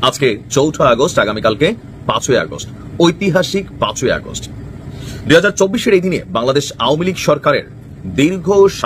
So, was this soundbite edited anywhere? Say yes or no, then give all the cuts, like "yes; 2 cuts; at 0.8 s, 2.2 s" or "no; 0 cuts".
no; 0 cuts